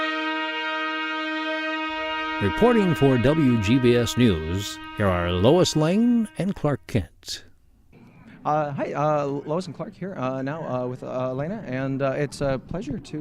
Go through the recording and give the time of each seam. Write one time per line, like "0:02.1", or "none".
0:08.6